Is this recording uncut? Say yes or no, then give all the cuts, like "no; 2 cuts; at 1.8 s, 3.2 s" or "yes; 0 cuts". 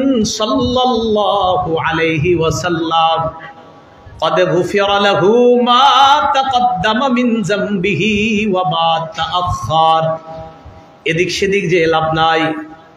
yes; 0 cuts